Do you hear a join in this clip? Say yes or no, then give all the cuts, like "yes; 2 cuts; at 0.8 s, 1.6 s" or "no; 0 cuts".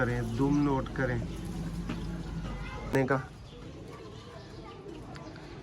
yes; 1 cut; at 2.9 s